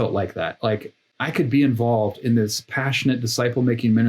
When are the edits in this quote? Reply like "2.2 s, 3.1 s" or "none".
1.0 s